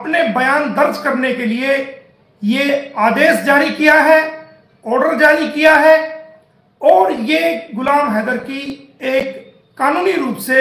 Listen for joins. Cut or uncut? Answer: uncut